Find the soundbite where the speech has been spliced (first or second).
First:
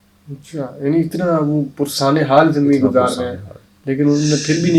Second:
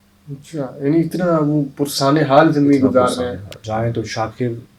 second